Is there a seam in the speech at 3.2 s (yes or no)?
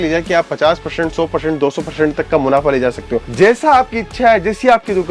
yes